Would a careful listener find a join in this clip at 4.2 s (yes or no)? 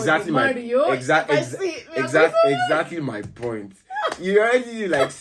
no